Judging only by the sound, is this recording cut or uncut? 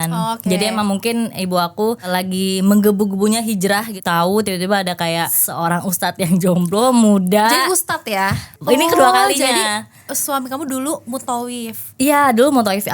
cut